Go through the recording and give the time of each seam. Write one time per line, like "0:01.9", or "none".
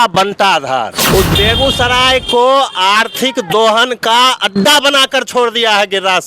0:01.0